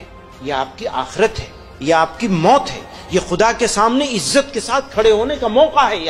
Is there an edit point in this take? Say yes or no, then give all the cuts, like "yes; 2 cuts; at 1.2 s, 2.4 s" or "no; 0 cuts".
no; 0 cuts